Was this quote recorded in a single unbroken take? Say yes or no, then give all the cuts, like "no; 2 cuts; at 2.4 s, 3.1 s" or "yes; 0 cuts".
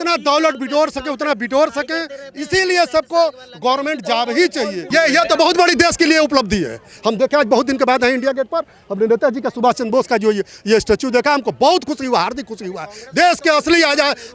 no; 1 cut; at 4.9 s